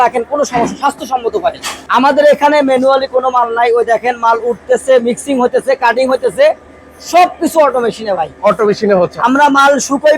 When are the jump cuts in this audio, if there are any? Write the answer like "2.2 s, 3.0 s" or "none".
1.8 s